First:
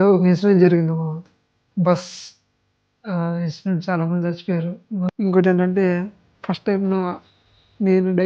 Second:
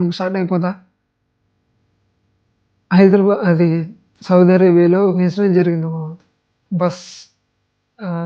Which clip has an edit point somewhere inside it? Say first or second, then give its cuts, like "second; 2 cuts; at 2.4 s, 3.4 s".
first; 1 cut; at 5.1 s